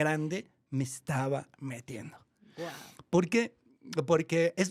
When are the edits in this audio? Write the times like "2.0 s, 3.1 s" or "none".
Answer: none